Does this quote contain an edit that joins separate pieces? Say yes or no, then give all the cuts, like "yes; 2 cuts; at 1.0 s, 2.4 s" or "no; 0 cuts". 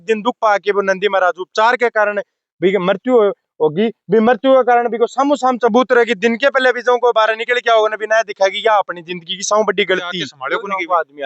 yes; 1 cut; at 10.3 s